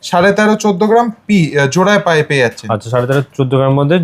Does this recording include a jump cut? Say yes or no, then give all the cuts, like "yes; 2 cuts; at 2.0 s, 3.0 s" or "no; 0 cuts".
no; 0 cuts